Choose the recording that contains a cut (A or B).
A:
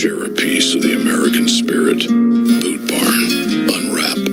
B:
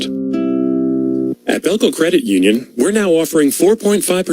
B